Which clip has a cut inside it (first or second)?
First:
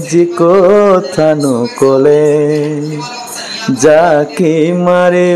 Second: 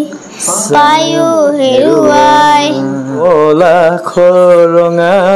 second